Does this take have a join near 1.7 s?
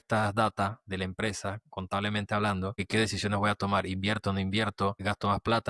no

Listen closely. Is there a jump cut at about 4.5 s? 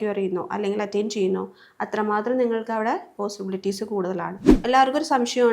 yes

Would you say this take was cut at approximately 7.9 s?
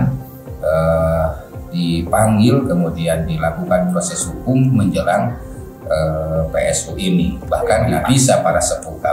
yes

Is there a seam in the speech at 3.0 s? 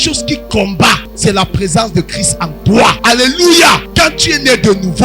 yes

